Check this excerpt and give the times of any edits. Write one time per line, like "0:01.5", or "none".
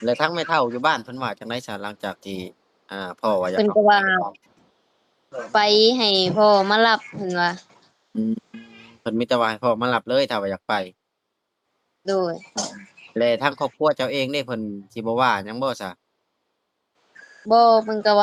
none